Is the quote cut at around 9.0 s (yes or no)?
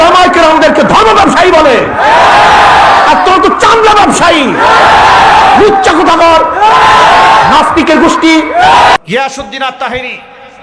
yes